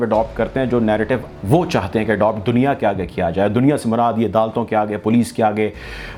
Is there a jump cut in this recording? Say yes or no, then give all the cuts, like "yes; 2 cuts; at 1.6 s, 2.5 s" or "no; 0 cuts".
no; 0 cuts